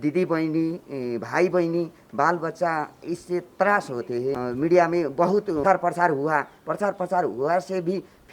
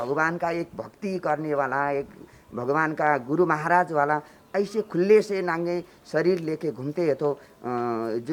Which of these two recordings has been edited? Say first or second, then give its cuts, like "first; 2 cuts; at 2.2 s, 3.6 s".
first; 2 cuts; at 4.4 s, 5.6 s